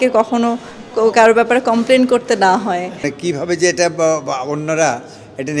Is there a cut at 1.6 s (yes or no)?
no